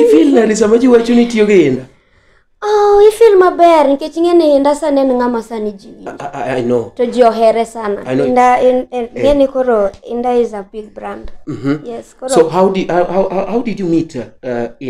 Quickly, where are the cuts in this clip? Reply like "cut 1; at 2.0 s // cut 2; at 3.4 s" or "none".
cut 1; at 8.3 s